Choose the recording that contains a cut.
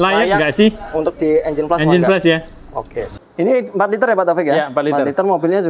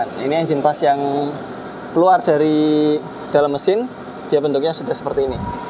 first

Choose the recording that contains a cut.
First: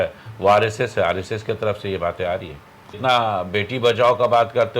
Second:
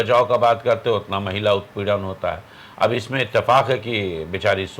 first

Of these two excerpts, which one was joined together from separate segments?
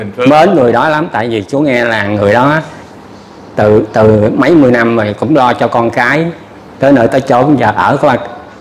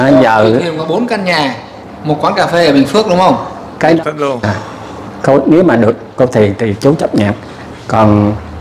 second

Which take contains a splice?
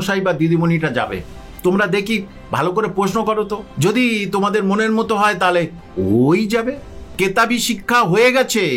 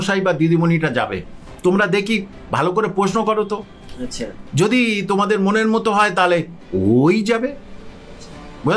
first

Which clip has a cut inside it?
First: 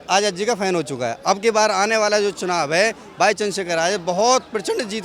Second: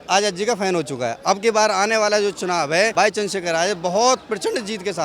second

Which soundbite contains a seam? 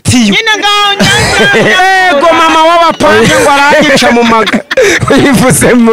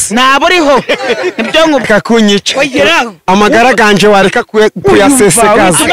second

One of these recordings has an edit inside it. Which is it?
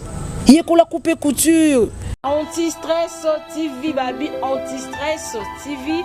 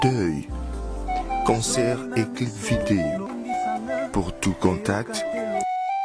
first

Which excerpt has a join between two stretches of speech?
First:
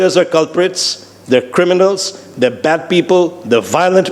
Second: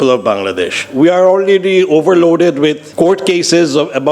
second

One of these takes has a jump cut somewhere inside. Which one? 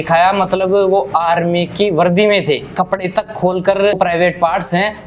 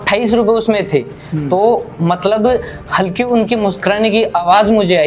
first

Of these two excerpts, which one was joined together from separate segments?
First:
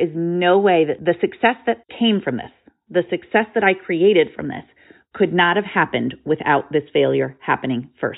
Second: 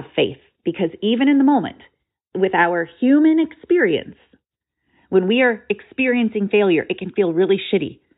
first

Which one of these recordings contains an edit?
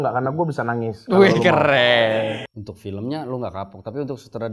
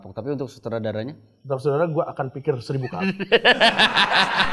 first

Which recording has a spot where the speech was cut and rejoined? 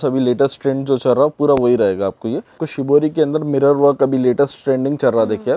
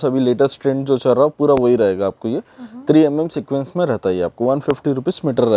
first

